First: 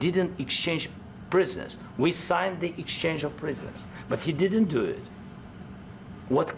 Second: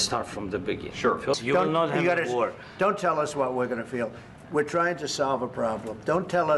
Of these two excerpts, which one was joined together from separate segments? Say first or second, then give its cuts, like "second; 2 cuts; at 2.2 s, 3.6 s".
second; 1 cut; at 1.4 s